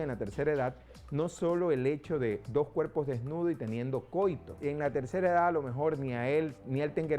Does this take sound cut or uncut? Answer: cut